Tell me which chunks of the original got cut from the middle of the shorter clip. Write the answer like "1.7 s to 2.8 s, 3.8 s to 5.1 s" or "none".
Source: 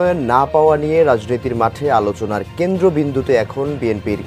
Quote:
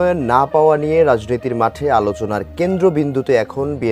none